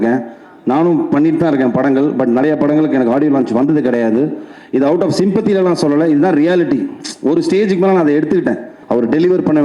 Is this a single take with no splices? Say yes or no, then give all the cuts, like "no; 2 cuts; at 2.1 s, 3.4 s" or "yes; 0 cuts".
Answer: no; 1 cut; at 8.7 s